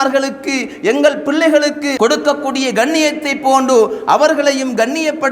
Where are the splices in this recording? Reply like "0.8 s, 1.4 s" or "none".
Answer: 1.9 s